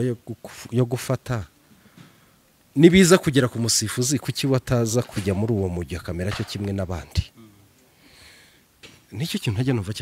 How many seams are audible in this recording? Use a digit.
0